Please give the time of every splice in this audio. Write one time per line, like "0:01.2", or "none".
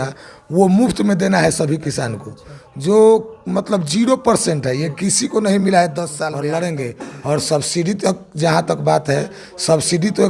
0:06.3